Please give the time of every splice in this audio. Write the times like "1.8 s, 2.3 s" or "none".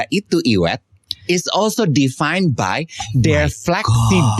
none